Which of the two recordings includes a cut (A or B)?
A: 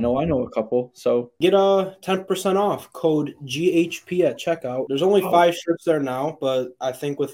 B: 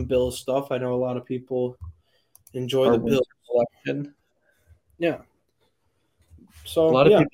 A